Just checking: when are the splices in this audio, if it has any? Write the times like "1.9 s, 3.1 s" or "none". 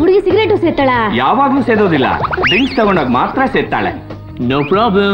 none